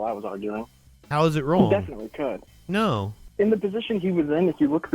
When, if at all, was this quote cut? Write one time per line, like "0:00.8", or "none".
0:03.2